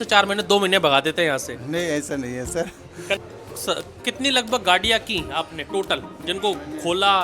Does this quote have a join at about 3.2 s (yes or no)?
yes